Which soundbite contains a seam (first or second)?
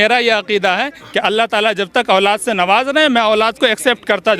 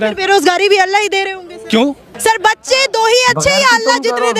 second